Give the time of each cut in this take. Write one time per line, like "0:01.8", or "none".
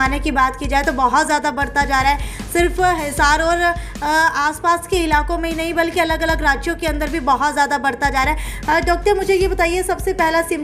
none